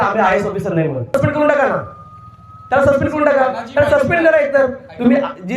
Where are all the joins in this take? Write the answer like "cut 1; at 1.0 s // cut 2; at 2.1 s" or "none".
cut 1; at 1.1 s